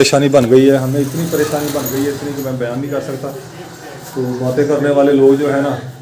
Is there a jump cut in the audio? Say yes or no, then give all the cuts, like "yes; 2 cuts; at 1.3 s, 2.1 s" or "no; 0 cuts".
no; 0 cuts